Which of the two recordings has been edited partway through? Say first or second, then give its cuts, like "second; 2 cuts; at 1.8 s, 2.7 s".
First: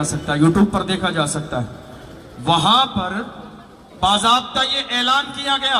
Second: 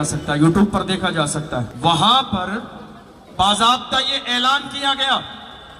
second; 1 cut; at 1.7 s